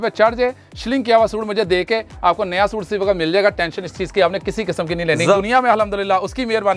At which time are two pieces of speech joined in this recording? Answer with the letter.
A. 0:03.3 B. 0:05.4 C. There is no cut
B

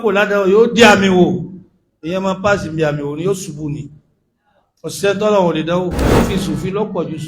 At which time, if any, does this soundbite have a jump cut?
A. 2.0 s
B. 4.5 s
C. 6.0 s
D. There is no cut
C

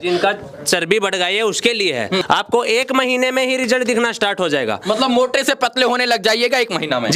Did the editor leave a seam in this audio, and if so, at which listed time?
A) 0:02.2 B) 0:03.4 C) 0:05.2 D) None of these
A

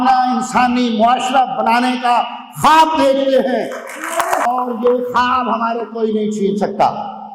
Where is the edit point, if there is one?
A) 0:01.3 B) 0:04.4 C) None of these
B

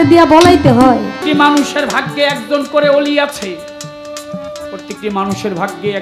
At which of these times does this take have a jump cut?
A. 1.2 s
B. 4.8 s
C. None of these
A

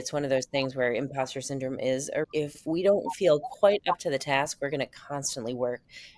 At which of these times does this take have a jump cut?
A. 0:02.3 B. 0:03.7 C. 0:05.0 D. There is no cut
A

